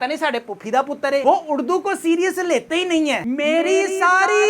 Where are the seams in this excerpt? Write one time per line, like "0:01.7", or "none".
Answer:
0:03.2